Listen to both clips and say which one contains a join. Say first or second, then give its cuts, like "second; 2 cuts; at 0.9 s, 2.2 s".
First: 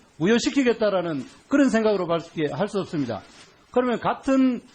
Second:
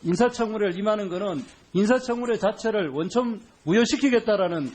second; 1 cut; at 2.3 s